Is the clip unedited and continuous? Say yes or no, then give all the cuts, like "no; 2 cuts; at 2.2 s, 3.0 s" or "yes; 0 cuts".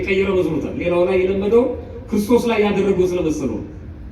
yes; 0 cuts